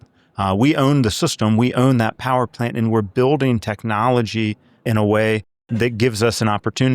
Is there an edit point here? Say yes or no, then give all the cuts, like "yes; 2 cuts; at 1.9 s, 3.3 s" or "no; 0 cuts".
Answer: yes; 1 cut; at 4.8 s